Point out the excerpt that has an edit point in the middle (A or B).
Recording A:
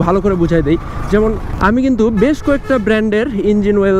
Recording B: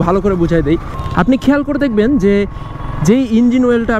B